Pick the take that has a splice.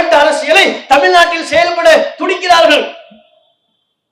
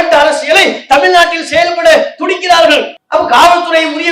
second; 1 cut; at 3.0 s

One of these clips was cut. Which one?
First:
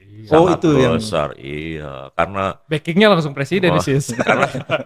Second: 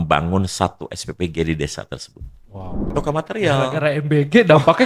second; 1 cut; at 2.9 s

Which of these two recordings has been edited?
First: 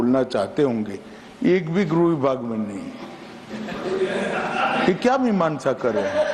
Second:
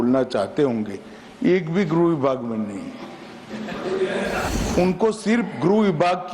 second; 1 cut; at 4.5 s

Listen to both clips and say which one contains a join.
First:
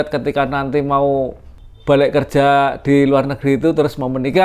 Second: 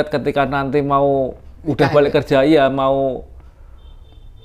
first; 1 cut; at 1.5 s

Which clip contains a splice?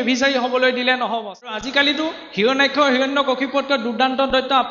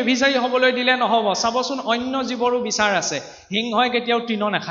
first; 1 cut; at 1.6 s

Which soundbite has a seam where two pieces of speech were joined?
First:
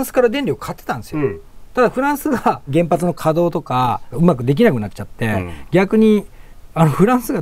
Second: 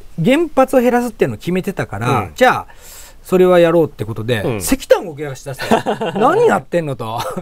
first; 2 cuts; at 2.6 s, 4.1 s

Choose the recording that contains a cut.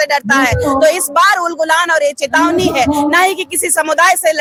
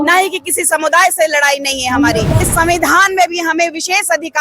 second; 1 cut; at 2.4 s

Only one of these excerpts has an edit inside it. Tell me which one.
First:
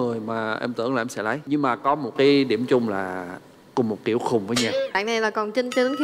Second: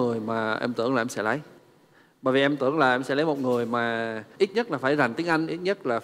first; 2 cuts; at 1.4 s, 4.9 s

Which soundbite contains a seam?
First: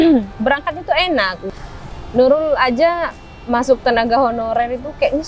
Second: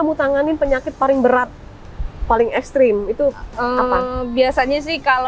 first; 1 cut; at 1.4 s

